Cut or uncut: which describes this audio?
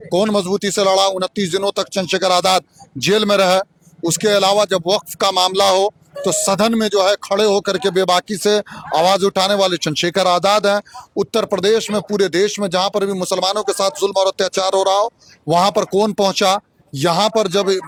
uncut